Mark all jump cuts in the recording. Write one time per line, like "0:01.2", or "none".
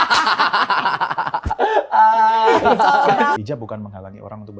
0:03.4

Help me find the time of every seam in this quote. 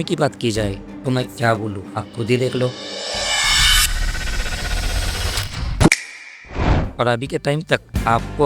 0:06.8

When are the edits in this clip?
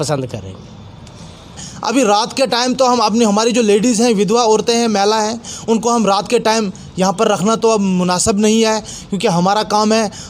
0:01.7

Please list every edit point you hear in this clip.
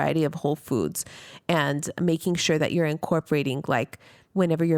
none

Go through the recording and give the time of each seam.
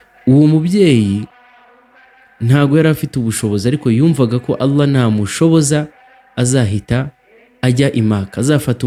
none

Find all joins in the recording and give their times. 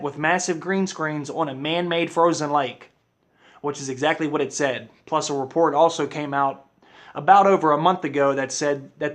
0:06.0

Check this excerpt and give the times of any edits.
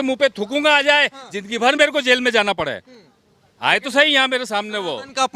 none

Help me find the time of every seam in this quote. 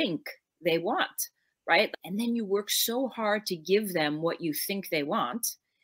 0:01.9

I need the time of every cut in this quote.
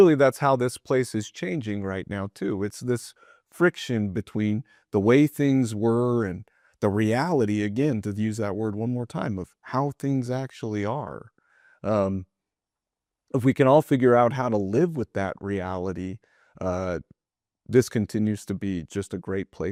none

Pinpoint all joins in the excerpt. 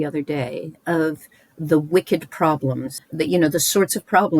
0:02.9

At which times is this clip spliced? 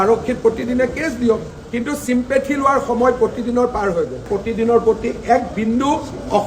0:01.6

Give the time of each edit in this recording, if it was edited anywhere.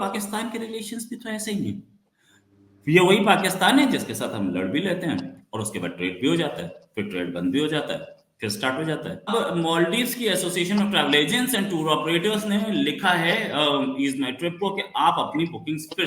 0:09.3

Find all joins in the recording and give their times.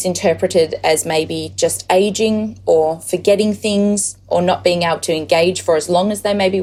none

